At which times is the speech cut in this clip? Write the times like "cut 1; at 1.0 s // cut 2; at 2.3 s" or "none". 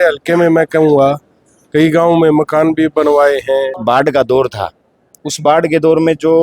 cut 1; at 3.7 s